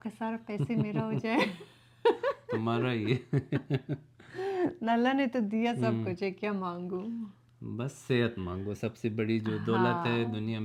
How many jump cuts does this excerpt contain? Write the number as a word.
zero